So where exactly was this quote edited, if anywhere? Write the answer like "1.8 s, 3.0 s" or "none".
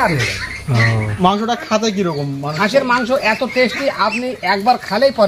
1.2 s

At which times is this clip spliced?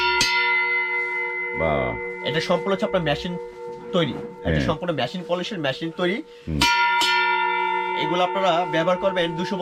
none

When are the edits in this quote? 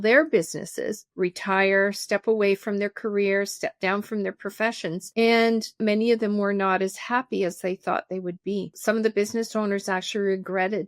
5.8 s

